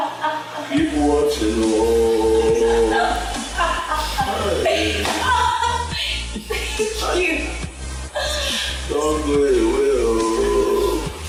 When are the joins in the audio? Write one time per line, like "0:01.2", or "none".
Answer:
none